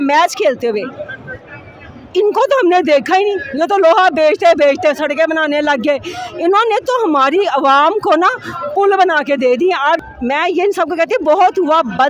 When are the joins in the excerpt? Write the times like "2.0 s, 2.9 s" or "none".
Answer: 10.0 s

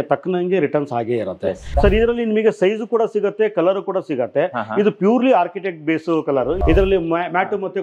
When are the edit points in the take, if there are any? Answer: 1.7 s, 6.6 s

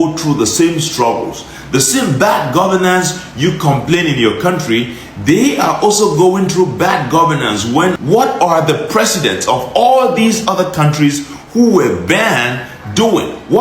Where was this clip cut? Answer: 8.0 s

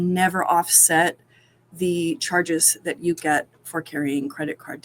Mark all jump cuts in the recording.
none

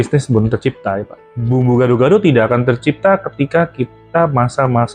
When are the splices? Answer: 1.4 s

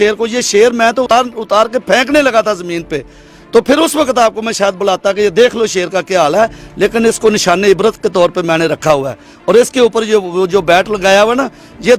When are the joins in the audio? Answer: 1.1 s

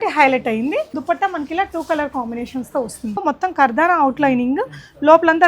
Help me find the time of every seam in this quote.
0.9 s, 3.2 s

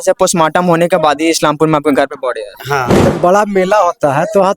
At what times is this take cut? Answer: 3.1 s

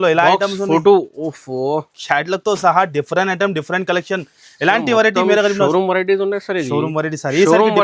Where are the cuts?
none

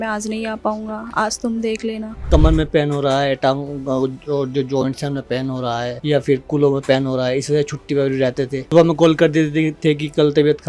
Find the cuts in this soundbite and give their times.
2.3 s, 6.0 s, 8.6 s

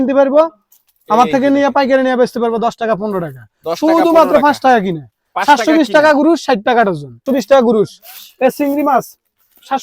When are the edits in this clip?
7.2 s

